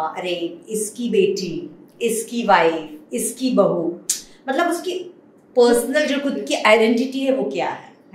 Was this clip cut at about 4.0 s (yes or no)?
no